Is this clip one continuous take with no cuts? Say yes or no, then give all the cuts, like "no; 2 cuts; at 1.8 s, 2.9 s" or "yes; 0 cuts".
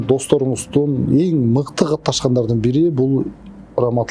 yes; 0 cuts